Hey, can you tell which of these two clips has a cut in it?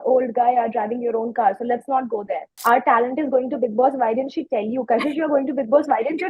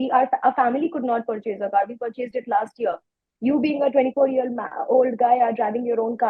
first; 1 cut; at 2.4 s

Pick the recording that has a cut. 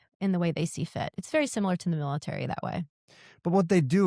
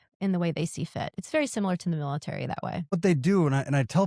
second; 1 cut; at 2.9 s

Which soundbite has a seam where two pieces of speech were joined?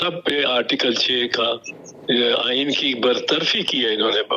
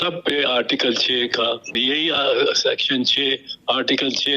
second; 1 cut; at 1.8 s

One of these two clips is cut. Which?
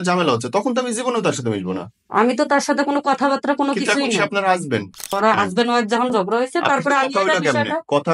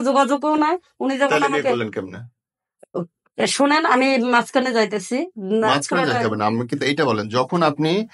first; 1 cut; at 5.1 s

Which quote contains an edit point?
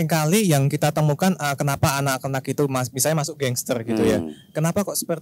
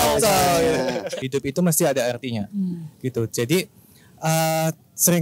second; 1 cut; at 1.1 s

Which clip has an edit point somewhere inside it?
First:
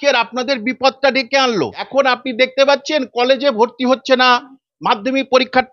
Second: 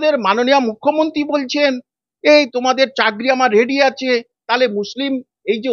first; 1 cut; at 1.8 s

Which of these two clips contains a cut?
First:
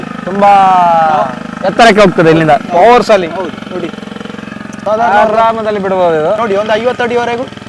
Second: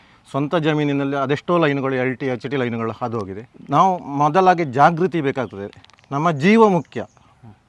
first; 2 cuts; at 4.8 s, 6.4 s

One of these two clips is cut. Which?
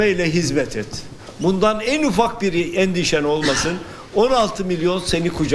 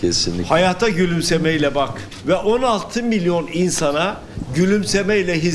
second; 1 cut; at 2.1 s

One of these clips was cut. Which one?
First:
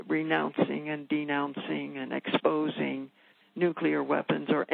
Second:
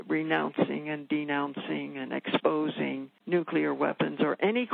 second; 1 cut; at 3.1 s

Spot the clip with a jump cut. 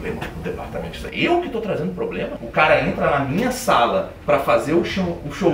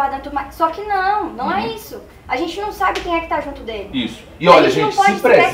first; 1 cut; at 2.3 s

